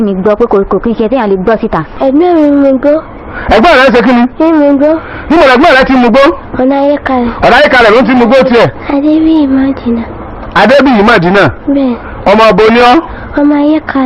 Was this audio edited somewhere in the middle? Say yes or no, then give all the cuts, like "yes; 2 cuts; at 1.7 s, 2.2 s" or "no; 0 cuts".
yes; 2 cuts; at 2.0 s, 8.8 s